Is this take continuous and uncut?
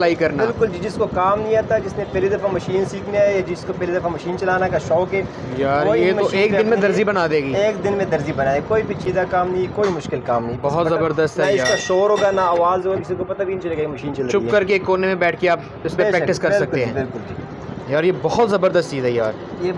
yes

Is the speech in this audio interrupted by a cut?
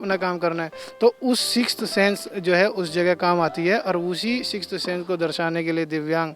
no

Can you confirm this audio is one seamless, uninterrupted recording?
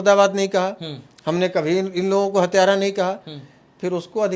yes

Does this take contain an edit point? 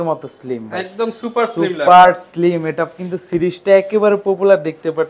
no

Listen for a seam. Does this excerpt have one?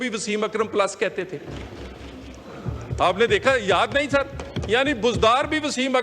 no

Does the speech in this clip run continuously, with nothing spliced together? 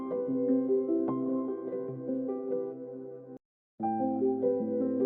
no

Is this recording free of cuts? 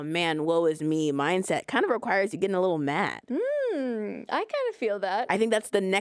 no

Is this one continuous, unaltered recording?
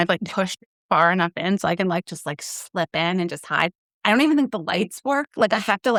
yes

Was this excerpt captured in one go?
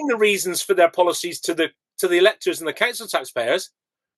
yes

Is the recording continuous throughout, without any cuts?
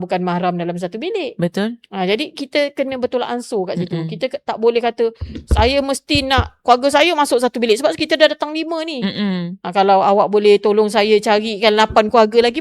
yes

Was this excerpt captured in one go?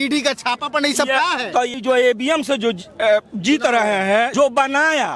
no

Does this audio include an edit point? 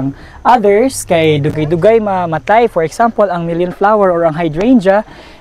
no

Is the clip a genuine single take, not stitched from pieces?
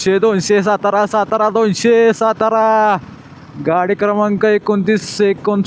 yes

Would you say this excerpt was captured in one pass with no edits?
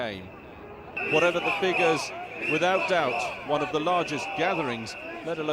no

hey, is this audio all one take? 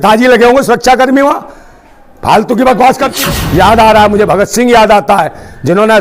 no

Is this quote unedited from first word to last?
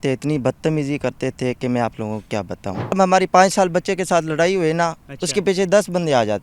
no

